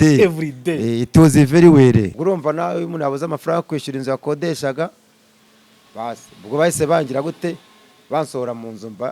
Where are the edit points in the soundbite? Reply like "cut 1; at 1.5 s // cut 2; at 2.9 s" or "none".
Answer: cut 1; at 2.1 s